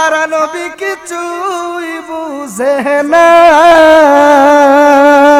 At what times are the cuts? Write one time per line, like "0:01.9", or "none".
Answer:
none